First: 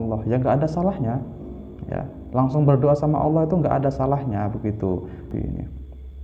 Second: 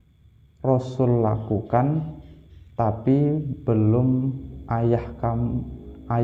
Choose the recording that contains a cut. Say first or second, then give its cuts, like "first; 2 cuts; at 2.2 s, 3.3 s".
first; 1 cut; at 5.3 s